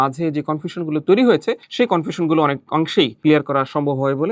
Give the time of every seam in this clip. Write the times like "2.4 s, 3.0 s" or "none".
1.6 s, 3.1 s